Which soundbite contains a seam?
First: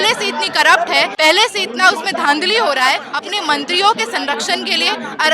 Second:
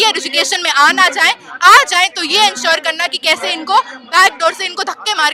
first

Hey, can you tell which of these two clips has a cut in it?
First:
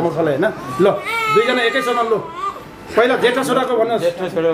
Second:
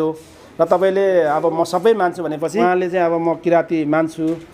second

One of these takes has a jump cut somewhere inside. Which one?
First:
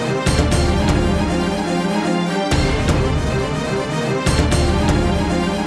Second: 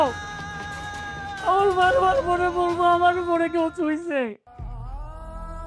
second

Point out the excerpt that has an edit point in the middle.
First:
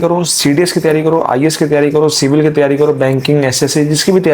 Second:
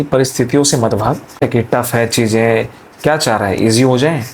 second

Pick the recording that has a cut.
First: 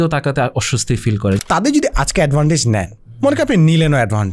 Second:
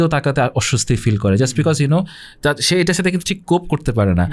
first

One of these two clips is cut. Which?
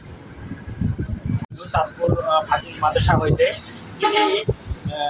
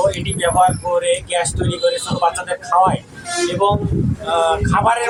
first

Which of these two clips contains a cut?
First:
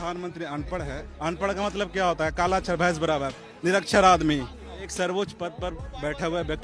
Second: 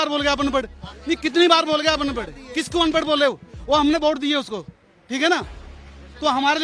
first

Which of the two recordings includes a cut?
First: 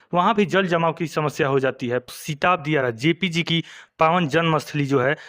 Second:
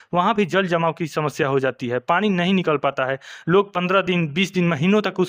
first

